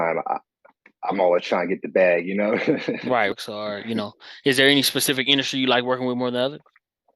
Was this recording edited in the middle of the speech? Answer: yes; 1 cut; at 3.3 s

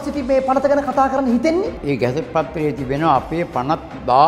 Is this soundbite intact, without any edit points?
no; 1 cut; at 1.8 s

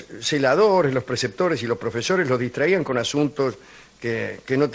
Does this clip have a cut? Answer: yes; 1 cut; at 0.9 s

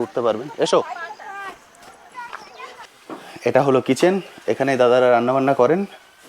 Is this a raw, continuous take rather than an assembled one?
no; 1 cut; at 2.8 s

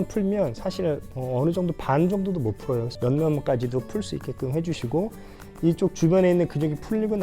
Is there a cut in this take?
yes; 2 cuts; at 1.1 s, 2.9 s

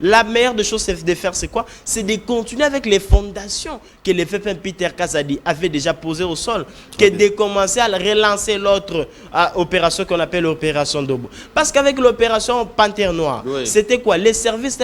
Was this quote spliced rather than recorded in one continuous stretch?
no; 0 cuts

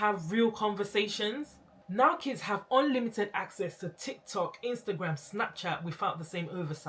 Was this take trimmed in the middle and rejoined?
yes; 1 cut; at 1.8 s

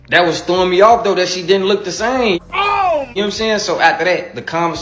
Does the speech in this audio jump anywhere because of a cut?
no; 0 cuts

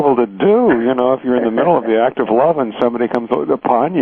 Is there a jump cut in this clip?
yes; 1 cut; at 2.4 s

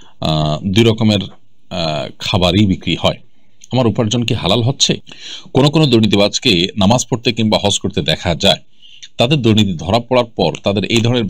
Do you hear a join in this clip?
yes; 1 cut; at 5.2 s

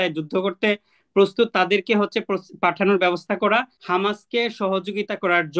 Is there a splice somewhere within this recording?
yes; 1 cut; at 3.8 s

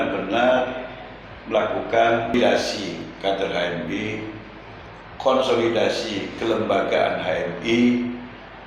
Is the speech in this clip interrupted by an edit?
yes; 1 cut; at 2.3 s

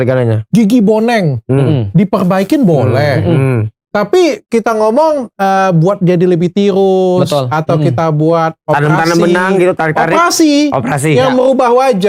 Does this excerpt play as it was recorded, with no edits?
yes; 0 cuts

